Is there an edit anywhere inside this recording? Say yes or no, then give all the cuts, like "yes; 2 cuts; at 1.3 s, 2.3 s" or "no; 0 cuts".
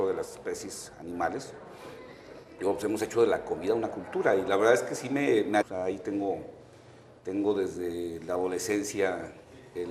no; 0 cuts